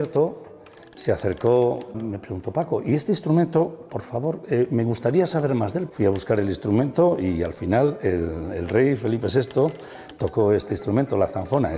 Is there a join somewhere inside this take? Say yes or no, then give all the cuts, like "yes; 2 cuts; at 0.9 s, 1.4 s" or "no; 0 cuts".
yes; 2 cuts; at 2.0 s, 5.9 s